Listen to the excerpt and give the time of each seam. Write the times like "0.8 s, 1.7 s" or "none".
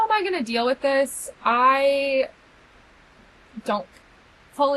none